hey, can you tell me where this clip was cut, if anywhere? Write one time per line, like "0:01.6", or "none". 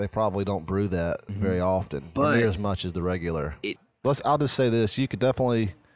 0:03.8